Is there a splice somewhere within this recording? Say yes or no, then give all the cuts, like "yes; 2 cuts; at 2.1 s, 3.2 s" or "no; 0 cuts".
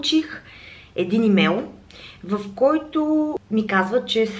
no; 0 cuts